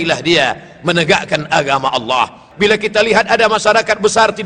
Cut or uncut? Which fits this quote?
cut